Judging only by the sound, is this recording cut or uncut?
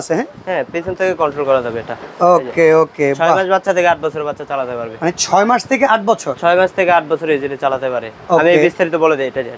uncut